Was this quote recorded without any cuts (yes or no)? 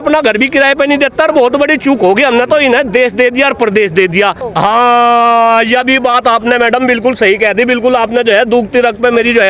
no